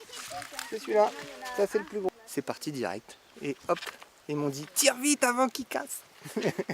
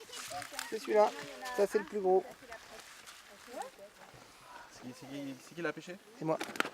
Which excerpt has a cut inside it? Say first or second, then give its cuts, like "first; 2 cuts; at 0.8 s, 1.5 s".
first; 1 cut; at 2.1 s